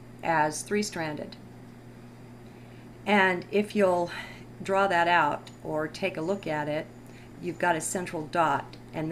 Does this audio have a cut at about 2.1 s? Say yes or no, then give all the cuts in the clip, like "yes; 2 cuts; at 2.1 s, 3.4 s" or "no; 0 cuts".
no; 0 cuts